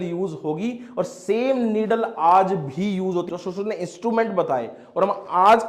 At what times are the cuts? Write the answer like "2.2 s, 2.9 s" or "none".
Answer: 3.3 s